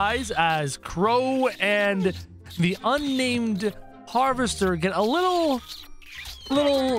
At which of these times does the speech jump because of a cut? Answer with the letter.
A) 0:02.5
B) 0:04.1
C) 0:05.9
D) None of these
D